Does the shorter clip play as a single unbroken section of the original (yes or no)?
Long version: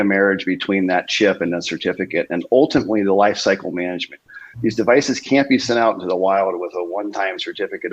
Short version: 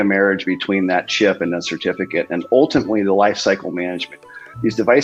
yes